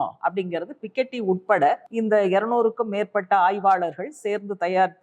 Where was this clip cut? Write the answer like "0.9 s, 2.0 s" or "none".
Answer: 1.9 s